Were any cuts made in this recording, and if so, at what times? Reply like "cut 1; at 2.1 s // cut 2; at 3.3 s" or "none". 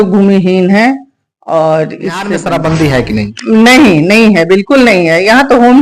cut 1; at 2.3 s